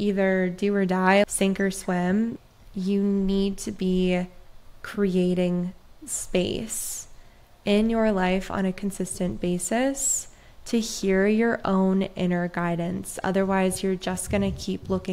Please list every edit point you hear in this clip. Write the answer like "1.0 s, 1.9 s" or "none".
1.3 s, 2.4 s